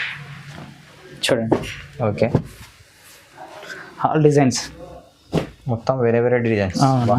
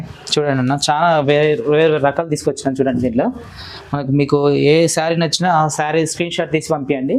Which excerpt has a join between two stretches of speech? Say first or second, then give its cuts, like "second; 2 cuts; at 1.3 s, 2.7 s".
first; 1 cut; at 2.3 s